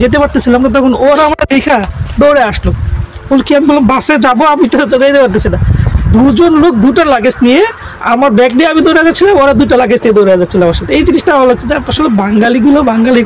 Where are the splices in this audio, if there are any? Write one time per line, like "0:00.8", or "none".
none